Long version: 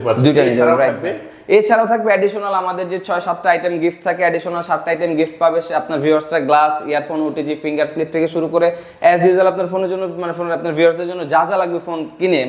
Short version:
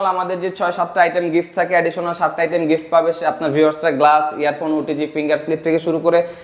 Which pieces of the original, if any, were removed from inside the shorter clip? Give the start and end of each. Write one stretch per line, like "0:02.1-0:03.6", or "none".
none